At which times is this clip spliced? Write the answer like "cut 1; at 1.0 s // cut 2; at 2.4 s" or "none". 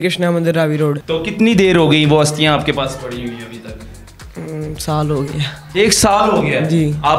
cut 1; at 1.0 s